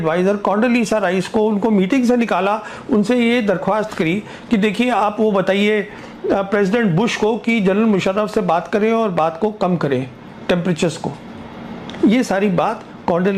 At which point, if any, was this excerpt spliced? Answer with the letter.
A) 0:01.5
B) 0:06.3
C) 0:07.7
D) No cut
D